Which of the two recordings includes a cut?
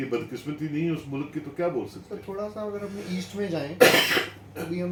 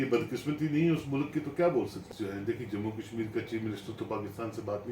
second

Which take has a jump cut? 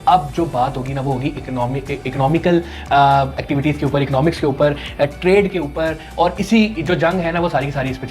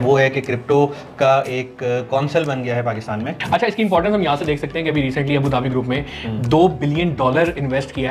second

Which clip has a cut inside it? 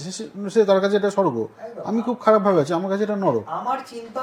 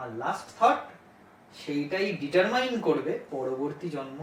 second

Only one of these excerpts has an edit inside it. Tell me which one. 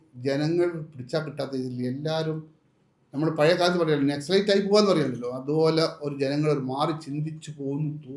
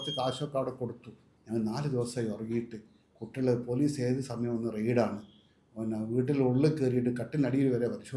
second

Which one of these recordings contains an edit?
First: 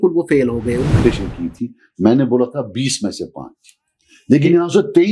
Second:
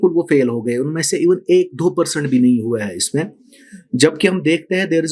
first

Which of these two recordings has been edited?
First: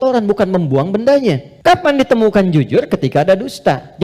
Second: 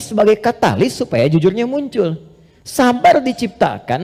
first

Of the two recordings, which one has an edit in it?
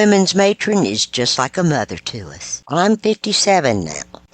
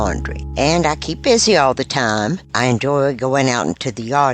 first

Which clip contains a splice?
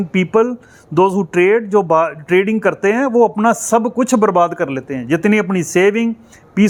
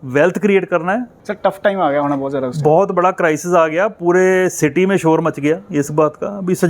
second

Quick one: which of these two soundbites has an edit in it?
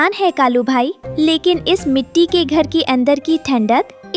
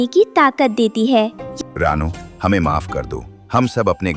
second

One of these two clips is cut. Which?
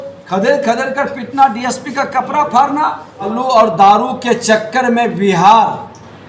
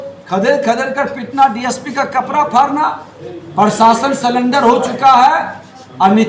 first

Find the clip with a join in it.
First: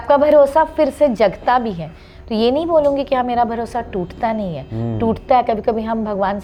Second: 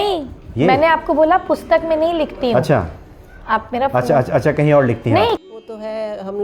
second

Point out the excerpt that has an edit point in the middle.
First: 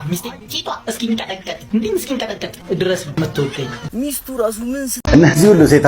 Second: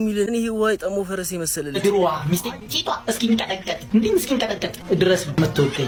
first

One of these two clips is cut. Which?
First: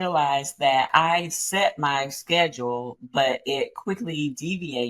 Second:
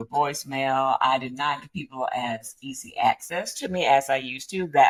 first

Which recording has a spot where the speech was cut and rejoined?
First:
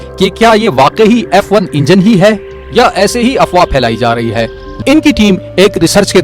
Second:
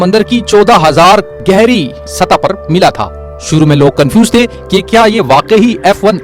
first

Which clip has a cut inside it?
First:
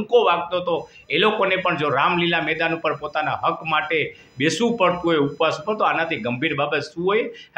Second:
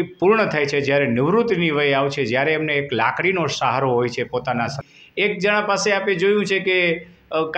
second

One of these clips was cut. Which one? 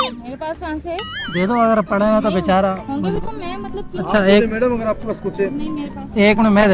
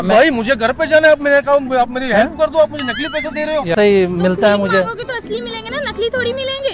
second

